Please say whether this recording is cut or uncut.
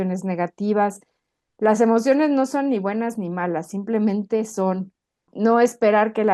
cut